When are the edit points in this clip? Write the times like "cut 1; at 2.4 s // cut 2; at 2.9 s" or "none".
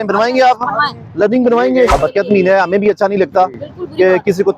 cut 1; at 1.9 s